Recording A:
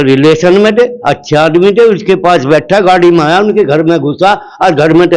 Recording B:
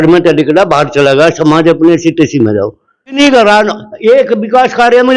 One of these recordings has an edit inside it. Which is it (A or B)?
B